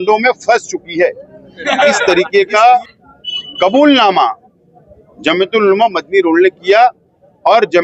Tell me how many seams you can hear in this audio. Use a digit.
1